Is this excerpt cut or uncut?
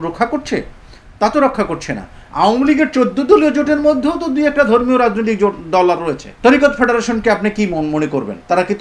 cut